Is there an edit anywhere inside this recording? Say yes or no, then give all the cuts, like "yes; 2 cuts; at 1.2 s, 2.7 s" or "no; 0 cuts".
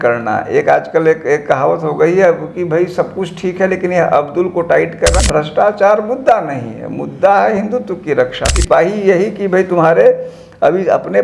yes; 2 cuts; at 5.1 s, 8.6 s